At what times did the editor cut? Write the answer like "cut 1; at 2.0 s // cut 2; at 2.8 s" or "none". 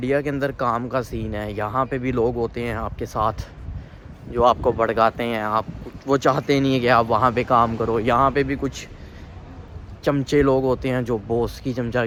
none